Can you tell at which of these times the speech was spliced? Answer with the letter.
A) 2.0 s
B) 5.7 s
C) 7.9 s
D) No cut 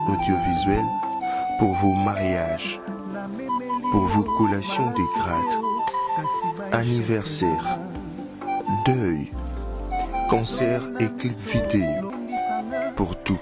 D